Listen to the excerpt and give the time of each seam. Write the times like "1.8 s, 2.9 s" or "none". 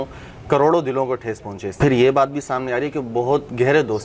1.8 s